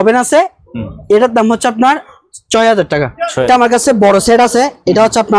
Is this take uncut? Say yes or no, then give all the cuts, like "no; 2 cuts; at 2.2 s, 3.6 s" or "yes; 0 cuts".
no; 1 cut; at 3.5 s